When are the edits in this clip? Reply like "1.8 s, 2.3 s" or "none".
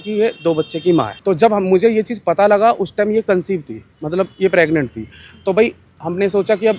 none